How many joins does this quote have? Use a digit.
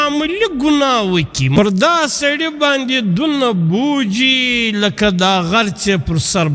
1